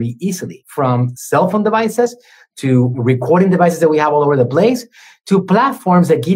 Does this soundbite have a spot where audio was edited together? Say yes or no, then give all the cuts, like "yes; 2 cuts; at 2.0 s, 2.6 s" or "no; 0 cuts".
yes; 2 cuts; at 0.8 s, 2.9 s